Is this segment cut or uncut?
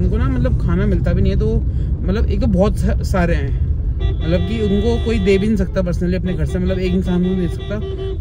uncut